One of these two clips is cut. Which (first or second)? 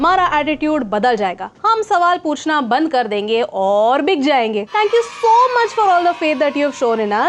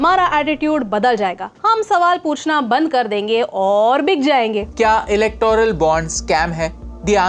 second